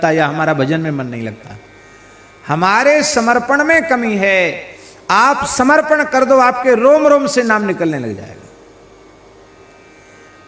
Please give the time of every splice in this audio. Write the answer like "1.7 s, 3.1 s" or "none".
none